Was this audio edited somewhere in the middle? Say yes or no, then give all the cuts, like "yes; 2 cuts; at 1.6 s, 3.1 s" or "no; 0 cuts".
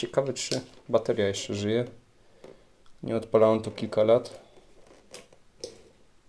no; 0 cuts